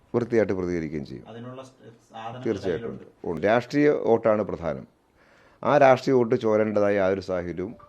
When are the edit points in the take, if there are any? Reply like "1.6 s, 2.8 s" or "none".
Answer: 3.4 s